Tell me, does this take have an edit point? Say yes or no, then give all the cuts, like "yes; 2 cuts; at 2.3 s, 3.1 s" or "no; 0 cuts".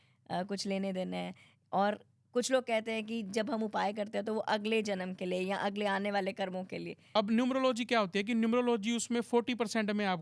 yes; 1 cut; at 6.9 s